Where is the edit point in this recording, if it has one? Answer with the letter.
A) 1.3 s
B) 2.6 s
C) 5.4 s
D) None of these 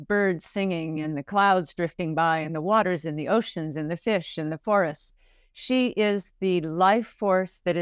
D